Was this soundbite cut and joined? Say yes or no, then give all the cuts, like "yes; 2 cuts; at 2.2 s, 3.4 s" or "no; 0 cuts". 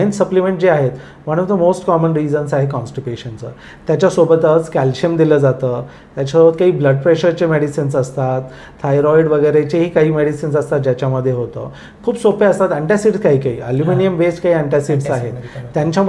no; 0 cuts